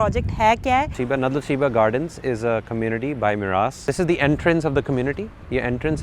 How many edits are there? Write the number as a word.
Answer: two